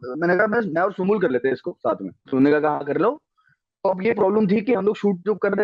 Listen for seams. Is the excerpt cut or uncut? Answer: cut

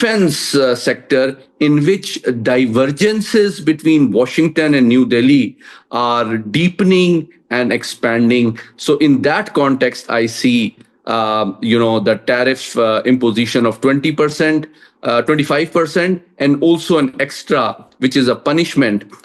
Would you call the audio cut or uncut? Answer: uncut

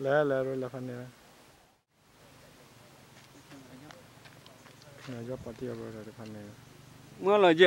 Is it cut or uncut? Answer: cut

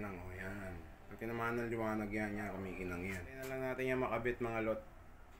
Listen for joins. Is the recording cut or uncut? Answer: cut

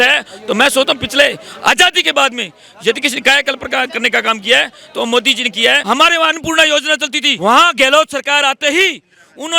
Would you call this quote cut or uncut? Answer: cut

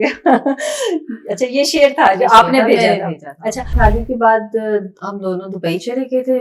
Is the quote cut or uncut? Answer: cut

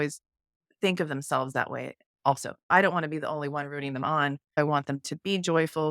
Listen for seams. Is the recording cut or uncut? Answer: cut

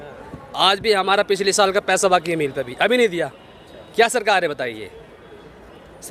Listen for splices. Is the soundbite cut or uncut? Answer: uncut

